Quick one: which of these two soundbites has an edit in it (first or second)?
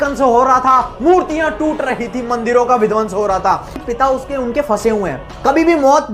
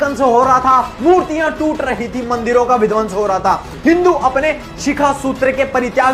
first